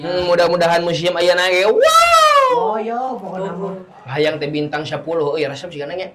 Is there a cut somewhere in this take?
no; 0 cuts

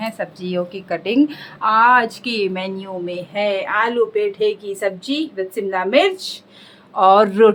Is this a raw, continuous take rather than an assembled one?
yes; 0 cuts

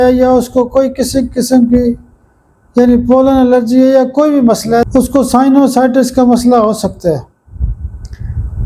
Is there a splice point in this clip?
no; 0 cuts

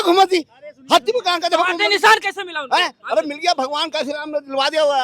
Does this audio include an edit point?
no; 0 cuts

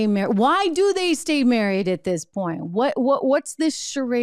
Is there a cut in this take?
no; 0 cuts

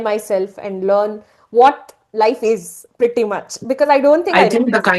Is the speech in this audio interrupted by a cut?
no; 0 cuts

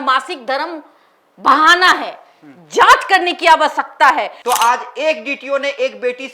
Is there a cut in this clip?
yes; 1 cut; at 4.3 s

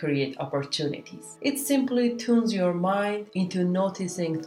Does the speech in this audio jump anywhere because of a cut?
no; 0 cuts

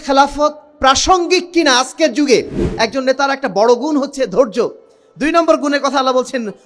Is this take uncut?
no; 1 cut; at 2.6 s

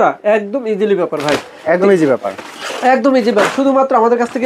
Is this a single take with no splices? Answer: yes; 0 cuts

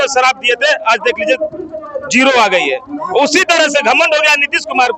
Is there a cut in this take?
no; 0 cuts

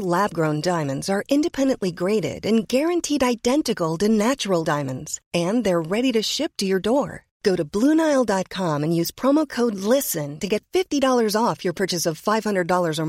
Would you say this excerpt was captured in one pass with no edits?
yes; 0 cuts

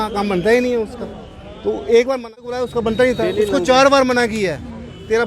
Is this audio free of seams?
no; 1 cut; at 2.5 s

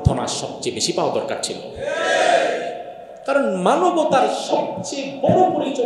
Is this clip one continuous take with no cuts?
yes; 0 cuts

